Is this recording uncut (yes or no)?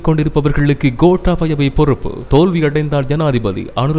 yes